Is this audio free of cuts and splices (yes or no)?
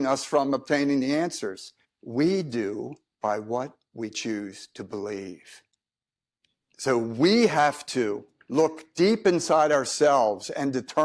yes